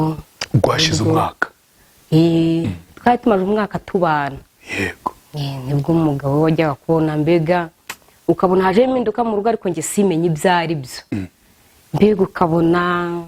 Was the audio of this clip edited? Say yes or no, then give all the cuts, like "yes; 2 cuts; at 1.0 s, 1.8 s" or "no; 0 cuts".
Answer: no; 0 cuts